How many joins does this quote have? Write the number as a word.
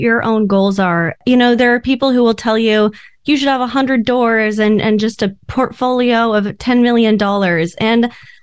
one